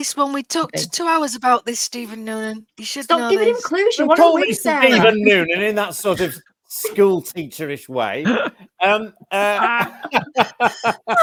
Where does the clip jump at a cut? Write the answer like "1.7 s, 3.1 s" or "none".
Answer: none